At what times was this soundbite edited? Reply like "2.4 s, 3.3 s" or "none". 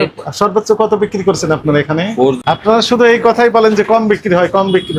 2.4 s